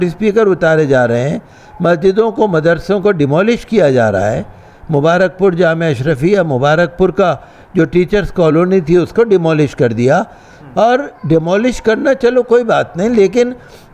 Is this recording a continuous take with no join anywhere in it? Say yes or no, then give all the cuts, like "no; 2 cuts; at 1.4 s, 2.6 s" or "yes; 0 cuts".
yes; 0 cuts